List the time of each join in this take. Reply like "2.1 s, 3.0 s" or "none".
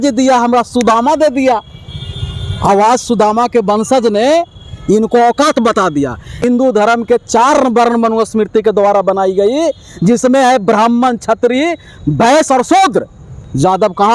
6.4 s